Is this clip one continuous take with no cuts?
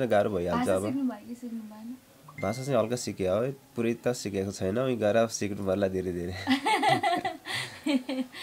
yes; 0 cuts

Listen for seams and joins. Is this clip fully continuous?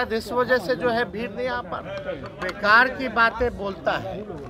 no; 1 cut; at 2.4 s

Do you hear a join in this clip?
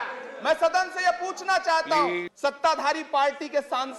yes; 1 cut; at 2.3 s

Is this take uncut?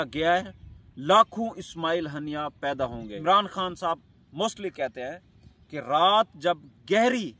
no; 1 cut; at 3.1 s

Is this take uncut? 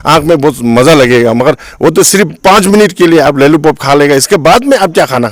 yes; 0 cuts

